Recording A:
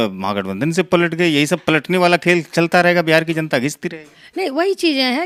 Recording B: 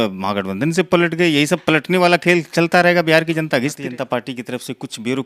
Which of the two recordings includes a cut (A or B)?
B